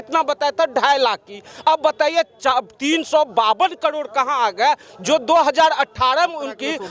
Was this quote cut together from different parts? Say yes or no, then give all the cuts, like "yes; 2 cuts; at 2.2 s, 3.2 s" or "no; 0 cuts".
no; 0 cuts